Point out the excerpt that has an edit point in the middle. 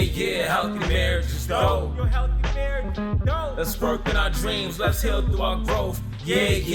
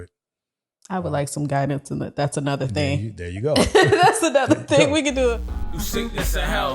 second; 1 cut; at 5.5 s

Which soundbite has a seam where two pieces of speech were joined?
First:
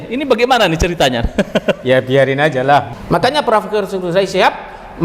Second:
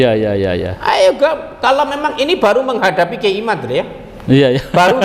first; 1 cut; at 3.0 s

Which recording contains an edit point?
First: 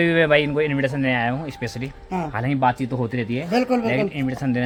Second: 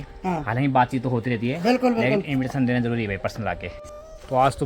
second; 1 cut; at 3.7 s

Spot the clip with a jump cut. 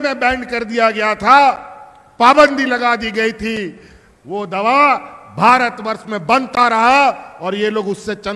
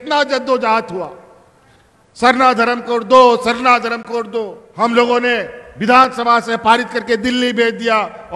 second; 1 cut; at 4.6 s

